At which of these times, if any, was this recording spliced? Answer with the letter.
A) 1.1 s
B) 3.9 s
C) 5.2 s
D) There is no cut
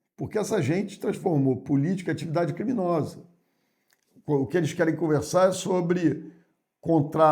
D